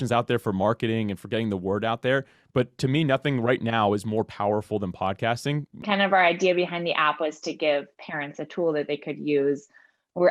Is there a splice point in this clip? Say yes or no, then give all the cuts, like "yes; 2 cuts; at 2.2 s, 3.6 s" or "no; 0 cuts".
yes; 1 cut; at 5.8 s